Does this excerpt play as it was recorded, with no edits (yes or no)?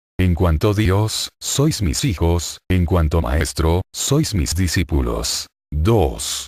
yes